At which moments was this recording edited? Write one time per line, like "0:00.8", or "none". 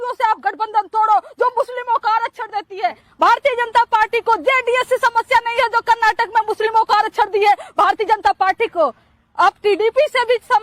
0:03.0